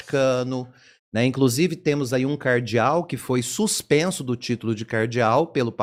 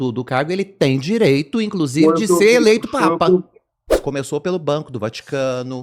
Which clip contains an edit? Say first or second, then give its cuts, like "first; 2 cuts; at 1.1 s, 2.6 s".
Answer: second; 1 cut; at 4.0 s